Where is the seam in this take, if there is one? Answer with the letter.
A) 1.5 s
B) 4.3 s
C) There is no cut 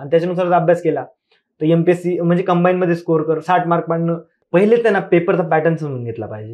B